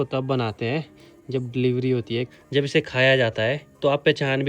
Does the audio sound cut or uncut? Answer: cut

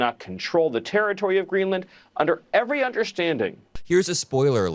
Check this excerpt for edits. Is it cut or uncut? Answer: cut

